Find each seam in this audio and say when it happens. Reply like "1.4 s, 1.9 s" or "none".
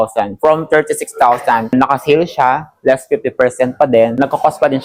none